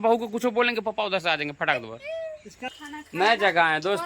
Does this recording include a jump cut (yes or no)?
yes